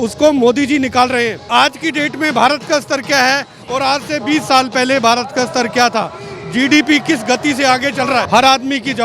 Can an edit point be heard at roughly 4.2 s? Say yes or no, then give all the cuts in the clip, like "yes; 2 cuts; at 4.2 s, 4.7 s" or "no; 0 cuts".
no; 2 cuts; at 1.4 s, 8.3 s